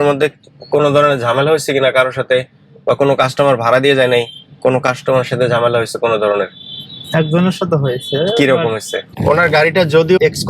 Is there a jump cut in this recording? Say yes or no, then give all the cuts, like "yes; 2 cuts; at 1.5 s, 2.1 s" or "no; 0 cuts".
yes; 1 cut; at 9.1 s